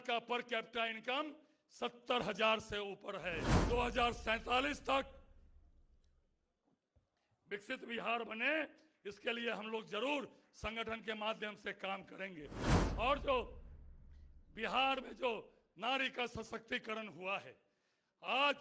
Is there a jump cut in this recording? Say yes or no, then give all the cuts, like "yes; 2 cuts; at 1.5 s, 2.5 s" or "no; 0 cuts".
yes; 1 cut; at 3.5 s